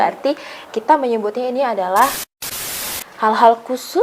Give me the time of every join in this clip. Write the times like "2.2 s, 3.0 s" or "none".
2.7 s